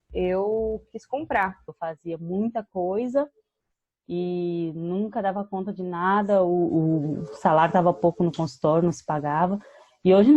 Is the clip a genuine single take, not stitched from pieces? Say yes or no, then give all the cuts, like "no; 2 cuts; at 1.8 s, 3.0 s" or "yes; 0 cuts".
no; 1 cut; at 1.6 s